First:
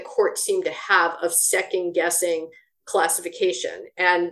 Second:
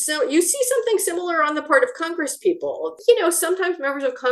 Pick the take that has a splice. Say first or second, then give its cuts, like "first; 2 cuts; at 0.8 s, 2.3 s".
second; 1 cut; at 2.9 s